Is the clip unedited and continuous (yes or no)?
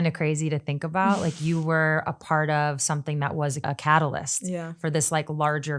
no